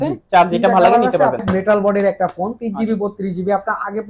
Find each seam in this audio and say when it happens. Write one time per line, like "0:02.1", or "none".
0:01.4